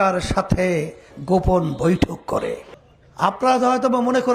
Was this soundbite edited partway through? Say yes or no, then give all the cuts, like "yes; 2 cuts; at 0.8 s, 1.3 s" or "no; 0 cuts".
yes; 1 cut; at 2.7 s